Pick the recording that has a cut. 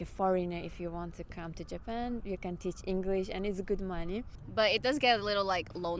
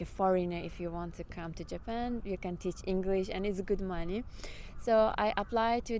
first; 1 cut; at 4.4 s

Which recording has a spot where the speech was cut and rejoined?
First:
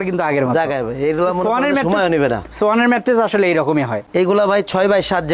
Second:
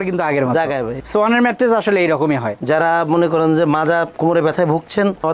second; 2 cuts; at 1.0 s, 2.5 s

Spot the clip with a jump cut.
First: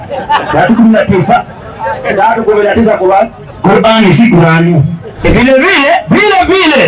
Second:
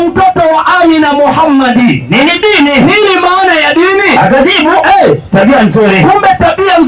first; 1 cut; at 5.2 s

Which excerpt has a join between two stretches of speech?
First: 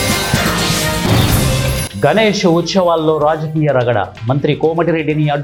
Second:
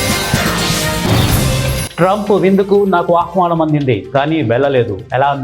second; 1 cut; at 1.8 s

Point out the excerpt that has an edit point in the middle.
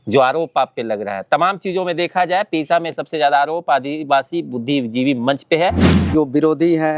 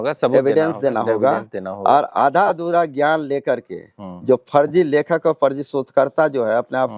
first; 1 cut; at 5.9 s

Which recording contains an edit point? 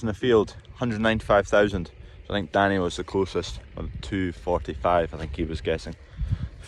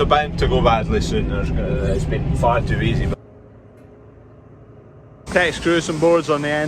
second; 2 cuts; at 3.1 s, 5.3 s

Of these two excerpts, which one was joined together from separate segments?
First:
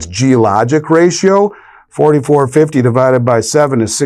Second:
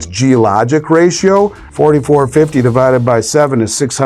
second; 1 cut; at 1.6 s

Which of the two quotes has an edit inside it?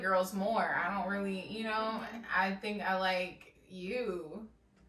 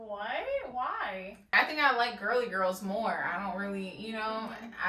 second; 1 cut; at 1.5 s

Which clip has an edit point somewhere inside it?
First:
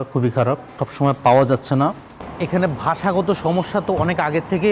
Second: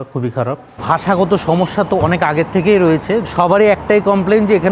second; 2 cuts; at 0.8 s, 3.2 s

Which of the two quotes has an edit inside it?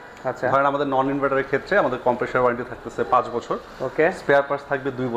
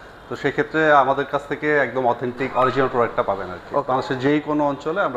second; 1 cut; at 3.9 s

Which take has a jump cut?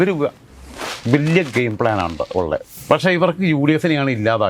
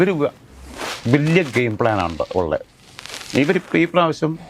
first; 1 cut; at 2.7 s

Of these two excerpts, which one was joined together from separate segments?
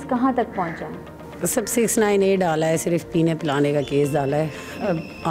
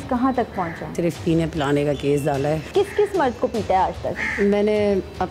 second; 2 cuts; at 0.9 s, 2.6 s

